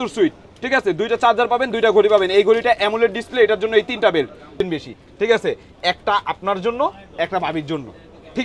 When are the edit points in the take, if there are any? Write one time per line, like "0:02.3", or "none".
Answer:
0:04.5